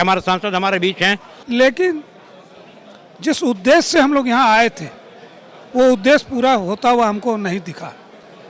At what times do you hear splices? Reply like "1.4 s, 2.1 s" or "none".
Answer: 1.3 s

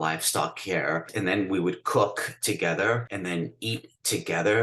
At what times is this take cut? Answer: 1.1 s, 3.1 s

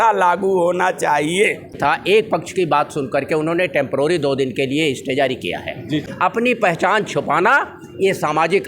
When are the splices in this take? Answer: 2.0 s, 6.1 s

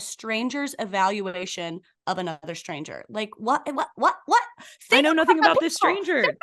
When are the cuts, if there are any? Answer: none

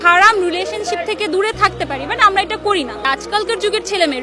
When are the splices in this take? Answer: 3.0 s

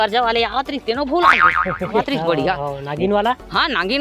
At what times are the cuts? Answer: 2.0 s

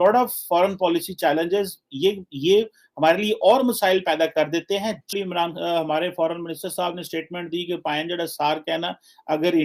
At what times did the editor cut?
none

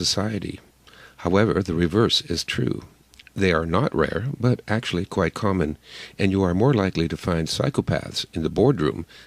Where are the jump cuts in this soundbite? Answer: 2.5 s

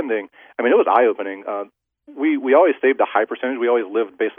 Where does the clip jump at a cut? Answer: none

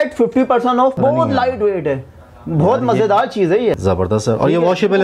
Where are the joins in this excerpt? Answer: 0.9 s, 3.8 s

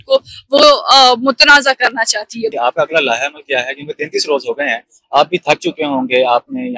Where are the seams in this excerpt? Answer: 2.5 s

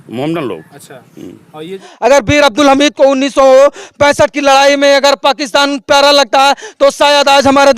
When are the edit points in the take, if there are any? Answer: 1.8 s

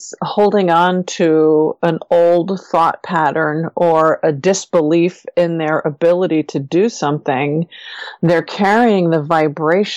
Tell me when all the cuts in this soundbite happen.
none

